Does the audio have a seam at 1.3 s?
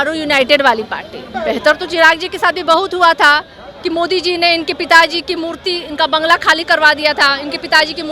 yes; 1 cut; at 1.3 s

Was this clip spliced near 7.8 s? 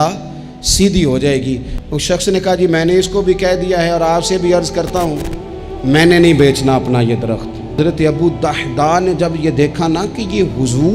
yes; 2 cuts; at 1.7 s, 7.8 s

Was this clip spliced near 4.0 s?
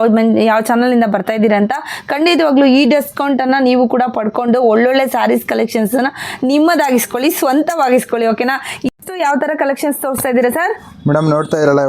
no; 1 cut; at 8.9 s

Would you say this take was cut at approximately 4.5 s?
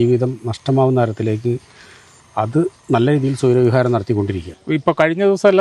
yes; 1 cut; at 4.5 s

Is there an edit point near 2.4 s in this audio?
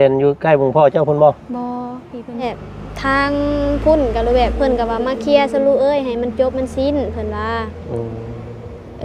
yes; 1 cut; at 2.4 s

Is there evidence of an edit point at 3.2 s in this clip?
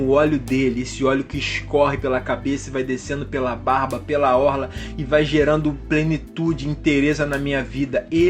no; 0 cuts

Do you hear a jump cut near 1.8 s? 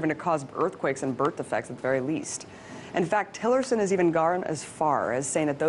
no; 0 cuts

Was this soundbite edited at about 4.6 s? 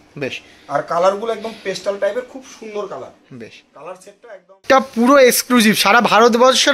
yes; 1 cut; at 4.6 s

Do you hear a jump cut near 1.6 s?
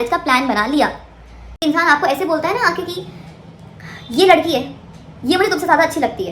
yes; 1 cut; at 1.6 s

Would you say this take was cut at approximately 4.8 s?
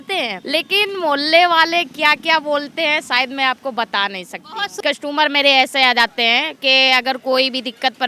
yes; 1 cut; at 4.8 s

